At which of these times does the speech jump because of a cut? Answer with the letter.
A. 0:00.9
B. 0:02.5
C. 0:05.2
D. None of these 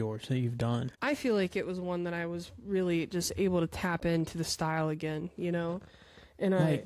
A